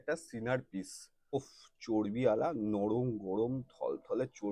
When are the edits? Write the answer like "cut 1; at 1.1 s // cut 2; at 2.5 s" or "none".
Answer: cut 1; at 1.3 s